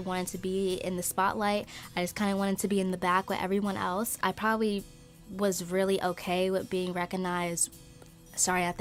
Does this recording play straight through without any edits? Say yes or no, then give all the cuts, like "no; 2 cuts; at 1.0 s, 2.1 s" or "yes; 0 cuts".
yes; 0 cuts